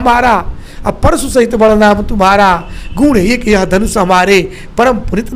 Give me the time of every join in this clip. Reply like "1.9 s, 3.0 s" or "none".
none